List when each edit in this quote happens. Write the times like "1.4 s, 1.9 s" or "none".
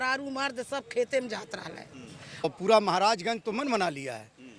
2.4 s